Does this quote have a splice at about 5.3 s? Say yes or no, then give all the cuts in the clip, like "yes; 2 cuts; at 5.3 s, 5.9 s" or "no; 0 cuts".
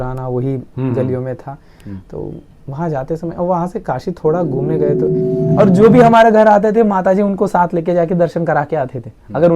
yes; 1 cut; at 5.3 s